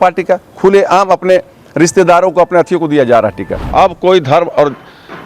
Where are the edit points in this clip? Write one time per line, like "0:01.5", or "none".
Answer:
0:03.7